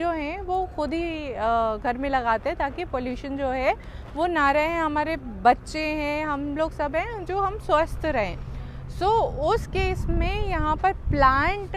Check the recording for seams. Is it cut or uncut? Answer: uncut